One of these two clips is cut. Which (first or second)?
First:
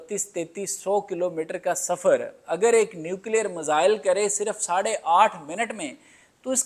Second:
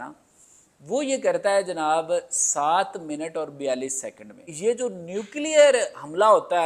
second